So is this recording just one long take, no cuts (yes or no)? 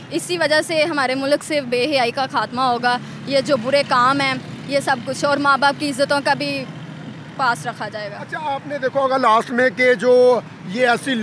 yes